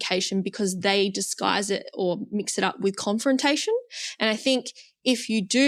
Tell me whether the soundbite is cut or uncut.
uncut